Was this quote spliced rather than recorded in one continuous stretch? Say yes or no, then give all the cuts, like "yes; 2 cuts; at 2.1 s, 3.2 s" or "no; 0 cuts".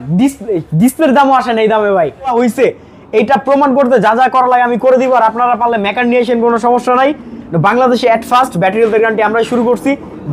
yes; 1 cut; at 2.3 s